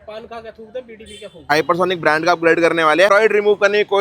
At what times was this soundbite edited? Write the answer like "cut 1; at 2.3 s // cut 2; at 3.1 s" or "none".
cut 1; at 1.4 s // cut 2; at 3.1 s